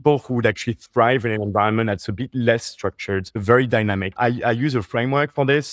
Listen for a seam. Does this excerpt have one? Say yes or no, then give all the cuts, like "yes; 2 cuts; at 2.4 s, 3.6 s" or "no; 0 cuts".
yes; 2 cuts; at 3.3 s, 4.1 s